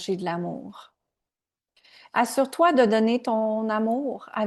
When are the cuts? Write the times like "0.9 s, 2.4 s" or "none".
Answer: none